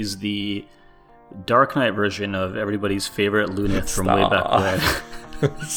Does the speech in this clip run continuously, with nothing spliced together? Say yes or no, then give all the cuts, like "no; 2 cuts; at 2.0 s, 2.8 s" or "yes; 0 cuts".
yes; 0 cuts